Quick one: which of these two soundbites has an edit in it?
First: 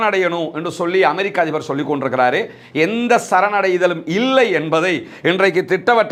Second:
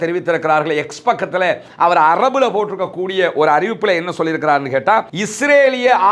second; 1 cut; at 5.2 s

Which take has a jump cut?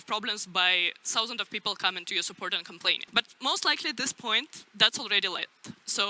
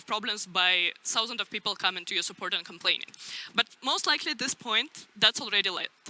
first; 1 cut; at 3.0 s

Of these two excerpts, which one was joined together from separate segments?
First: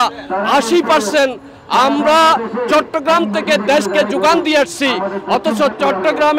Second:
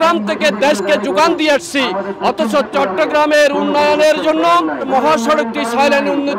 second; 1 cut; at 4.9 s

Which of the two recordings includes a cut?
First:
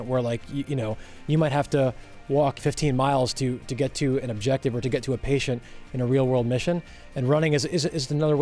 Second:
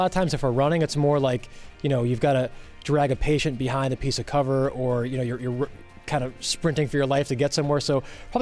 first; 1 cut; at 2.6 s

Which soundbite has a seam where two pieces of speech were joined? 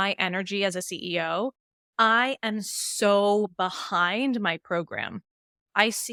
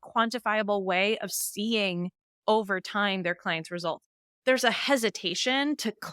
second; 1 cut; at 4.3 s

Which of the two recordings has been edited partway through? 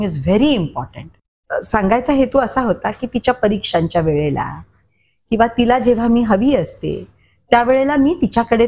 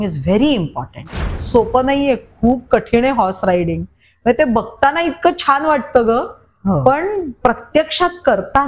second; 1 cut; at 1.4 s

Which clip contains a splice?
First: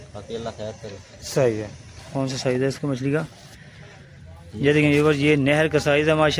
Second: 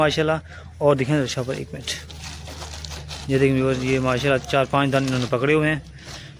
first; 1 cut; at 2.0 s

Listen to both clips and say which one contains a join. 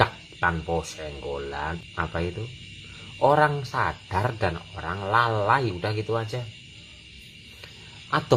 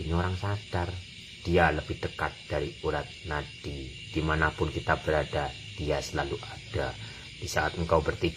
first; 1 cut; at 1.8 s

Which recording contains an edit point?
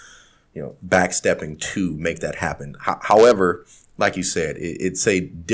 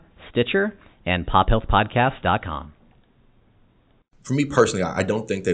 second; 1 cut; at 4.0 s

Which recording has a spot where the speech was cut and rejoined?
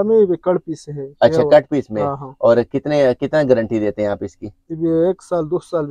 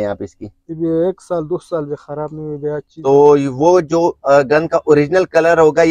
second; 1 cut; at 2.9 s

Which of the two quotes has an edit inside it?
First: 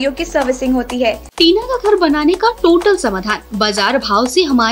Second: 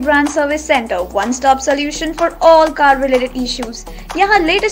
first; 1 cut; at 1.3 s

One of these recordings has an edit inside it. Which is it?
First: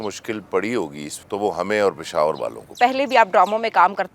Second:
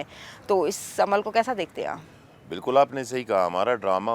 first; 2 cuts; at 1.1 s, 2.7 s

